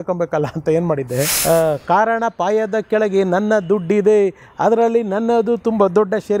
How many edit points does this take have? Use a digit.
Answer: 1